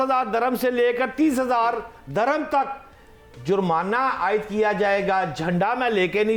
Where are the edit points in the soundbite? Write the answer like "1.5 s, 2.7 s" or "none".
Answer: none